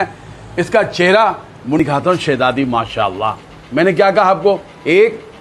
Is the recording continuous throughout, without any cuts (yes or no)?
no